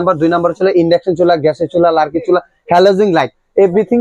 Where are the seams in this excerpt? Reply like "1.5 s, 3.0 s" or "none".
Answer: none